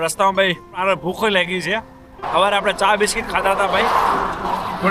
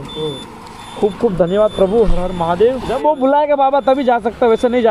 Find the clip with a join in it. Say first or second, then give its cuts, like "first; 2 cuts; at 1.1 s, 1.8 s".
second; 1 cut; at 2.9 s